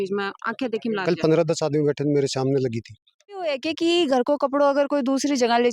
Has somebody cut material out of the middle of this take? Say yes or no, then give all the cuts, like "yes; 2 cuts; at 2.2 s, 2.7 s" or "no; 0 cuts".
yes; 1 cut; at 3.5 s